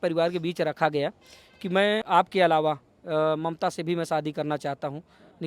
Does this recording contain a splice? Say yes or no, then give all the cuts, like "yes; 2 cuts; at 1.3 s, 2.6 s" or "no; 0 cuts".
yes; 1 cut; at 2.0 s